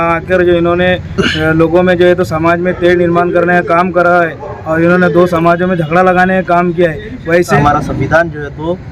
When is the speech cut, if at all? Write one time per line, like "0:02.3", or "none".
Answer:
0:07.5